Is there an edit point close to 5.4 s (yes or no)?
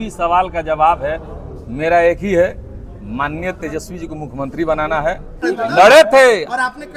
yes